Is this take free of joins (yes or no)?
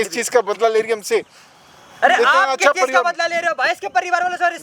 yes